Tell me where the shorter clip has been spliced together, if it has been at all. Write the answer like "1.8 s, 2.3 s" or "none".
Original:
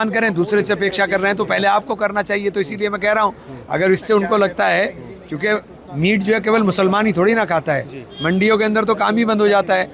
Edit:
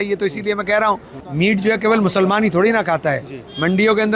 1.2 s